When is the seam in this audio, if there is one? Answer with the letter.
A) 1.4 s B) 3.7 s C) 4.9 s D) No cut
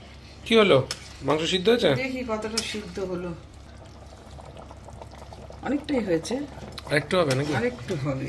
B